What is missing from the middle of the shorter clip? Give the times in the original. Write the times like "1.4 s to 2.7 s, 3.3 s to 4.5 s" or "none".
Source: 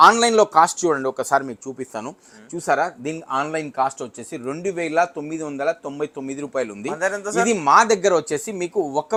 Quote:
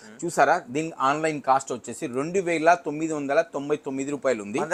none

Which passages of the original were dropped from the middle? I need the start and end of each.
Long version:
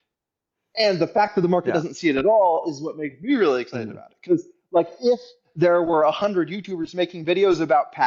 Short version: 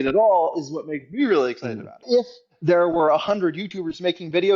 4.1 s to 4.9 s

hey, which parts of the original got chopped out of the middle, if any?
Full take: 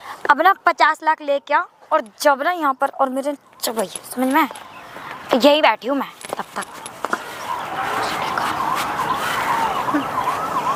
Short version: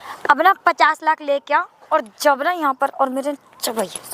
none

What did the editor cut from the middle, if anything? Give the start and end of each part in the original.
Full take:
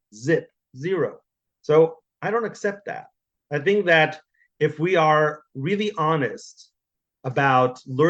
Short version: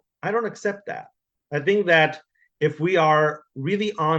none

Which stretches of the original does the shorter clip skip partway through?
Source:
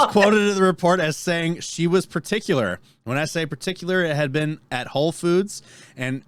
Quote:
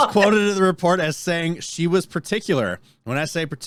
none

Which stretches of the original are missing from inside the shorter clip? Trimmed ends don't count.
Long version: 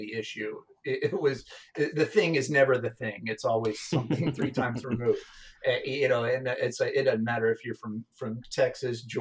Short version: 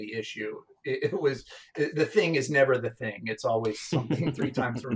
none

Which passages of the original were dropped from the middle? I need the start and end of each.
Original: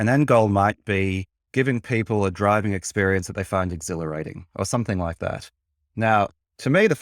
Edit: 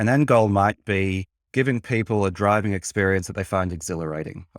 none

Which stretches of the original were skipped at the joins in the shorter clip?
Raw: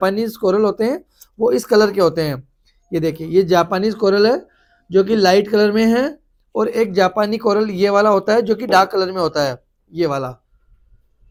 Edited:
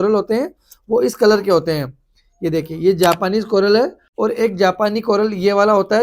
4.5 s to 6.4 s

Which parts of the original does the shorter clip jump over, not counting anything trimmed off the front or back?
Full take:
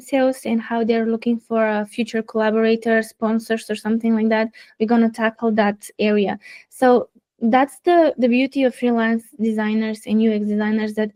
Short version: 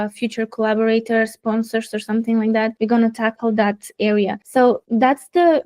4.5 s to 4.7 s, 6.6 s to 7.2 s

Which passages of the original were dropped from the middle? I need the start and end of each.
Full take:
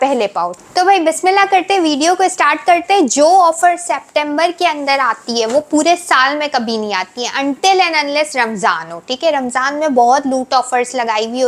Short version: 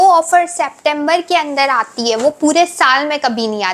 none

